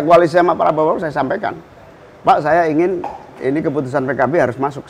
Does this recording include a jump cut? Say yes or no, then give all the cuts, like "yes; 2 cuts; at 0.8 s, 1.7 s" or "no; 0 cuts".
no; 0 cuts